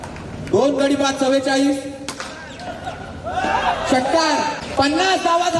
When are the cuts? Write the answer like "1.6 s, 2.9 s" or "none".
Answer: 4.6 s